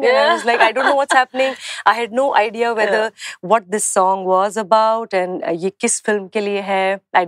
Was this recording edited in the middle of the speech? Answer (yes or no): no